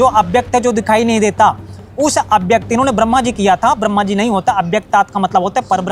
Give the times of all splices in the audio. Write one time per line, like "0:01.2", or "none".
none